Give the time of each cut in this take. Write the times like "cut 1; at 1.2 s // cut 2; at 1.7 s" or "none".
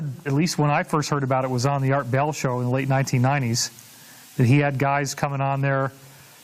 cut 1; at 2.7 s